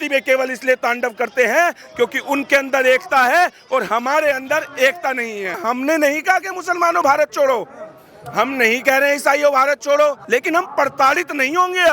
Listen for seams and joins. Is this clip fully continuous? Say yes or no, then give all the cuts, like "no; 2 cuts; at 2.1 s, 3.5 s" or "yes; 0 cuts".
no; 2 cuts; at 5.6 s, 10.2 s